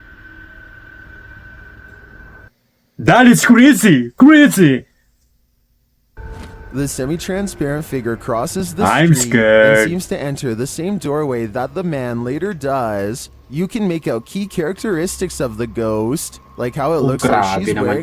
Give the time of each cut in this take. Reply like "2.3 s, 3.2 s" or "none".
6.2 s